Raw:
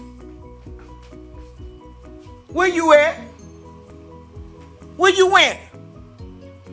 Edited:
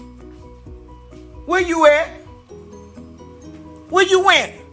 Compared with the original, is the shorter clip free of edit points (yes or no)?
no